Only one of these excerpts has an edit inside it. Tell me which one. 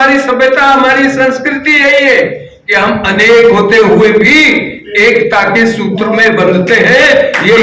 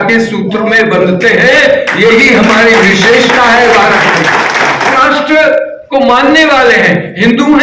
second; 1 cut; at 5.0 s

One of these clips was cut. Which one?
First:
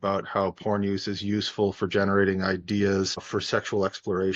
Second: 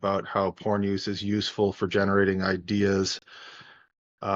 first; 1 cut; at 3.2 s

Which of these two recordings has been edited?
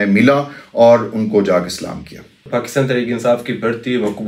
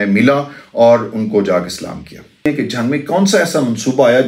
second; 1 cut; at 2.5 s

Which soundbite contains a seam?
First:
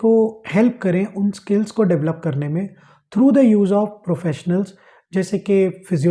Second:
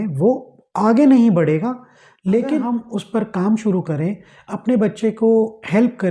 second; 1 cut; at 2.8 s

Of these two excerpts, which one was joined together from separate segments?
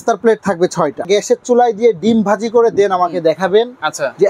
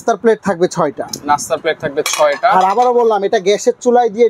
first; 1 cut; at 1.1 s

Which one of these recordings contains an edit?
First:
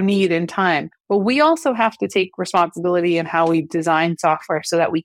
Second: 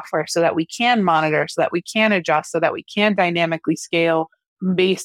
first; 1 cut; at 0.9 s

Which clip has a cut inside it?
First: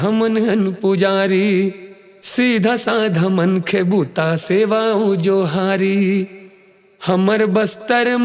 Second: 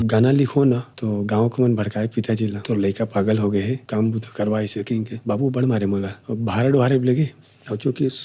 second; 5 cuts; at 0.9 s, 2.6 s, 3.8 s, 5.1 s, 6.2 s

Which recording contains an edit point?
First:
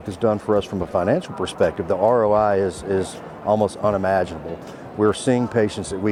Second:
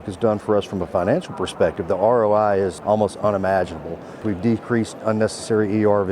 second; 2 cuts; at 2.8 s, 4.1 s

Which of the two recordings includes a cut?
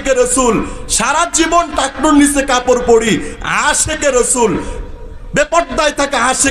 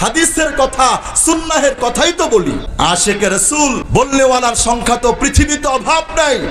second; 2 cuts; at 2.7 s, 3.8 s

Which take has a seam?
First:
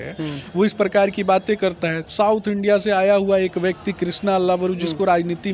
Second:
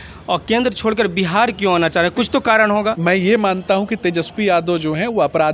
second; 1 cut; at 3.0 s

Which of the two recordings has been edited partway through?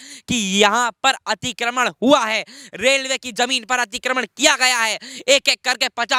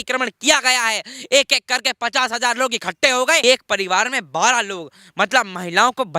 second; 1 cut; at 3.4 s

